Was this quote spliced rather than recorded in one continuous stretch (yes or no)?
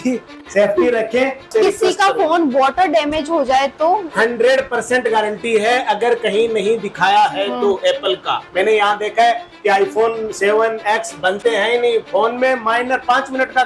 yes